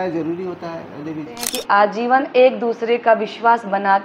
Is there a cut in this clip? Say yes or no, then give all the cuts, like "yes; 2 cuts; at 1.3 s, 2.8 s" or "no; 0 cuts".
yes; 1 cut; at 1.5 s